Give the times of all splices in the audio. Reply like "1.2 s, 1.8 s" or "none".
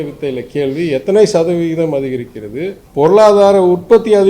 2.8 s